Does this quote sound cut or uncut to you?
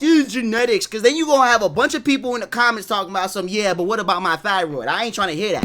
uncut